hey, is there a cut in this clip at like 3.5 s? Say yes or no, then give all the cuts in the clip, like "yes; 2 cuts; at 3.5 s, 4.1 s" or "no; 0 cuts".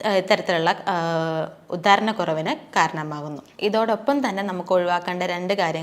yes; 1 cut; at 3.5 s